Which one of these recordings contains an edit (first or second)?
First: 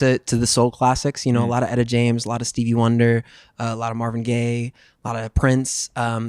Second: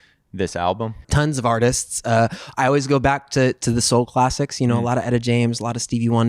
second